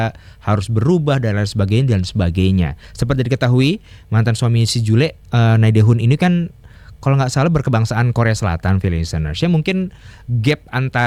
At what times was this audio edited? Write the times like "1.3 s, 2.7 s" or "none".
none